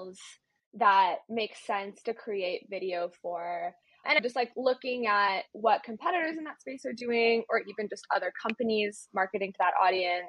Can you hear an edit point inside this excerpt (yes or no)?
no